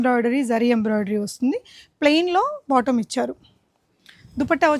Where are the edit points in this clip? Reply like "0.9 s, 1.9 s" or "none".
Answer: none